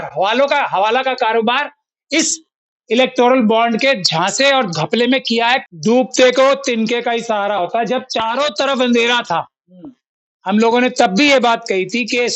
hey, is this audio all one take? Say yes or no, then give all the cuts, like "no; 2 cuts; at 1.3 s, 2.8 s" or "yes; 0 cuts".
no; 1 cut; at 5.7 s